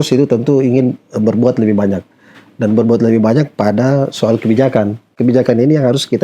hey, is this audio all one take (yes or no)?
no